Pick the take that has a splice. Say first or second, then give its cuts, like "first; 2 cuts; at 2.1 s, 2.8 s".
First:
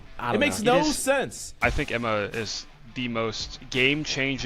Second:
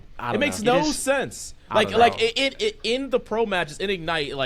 first; 2 cuts; at 1.5 s, 3.5 s